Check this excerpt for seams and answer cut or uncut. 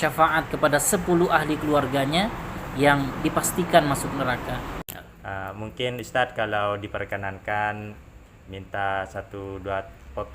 cut